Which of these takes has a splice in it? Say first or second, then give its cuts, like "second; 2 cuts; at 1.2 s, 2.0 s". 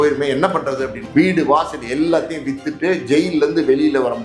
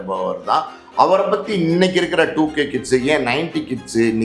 first; 1 cut; at 1.0 s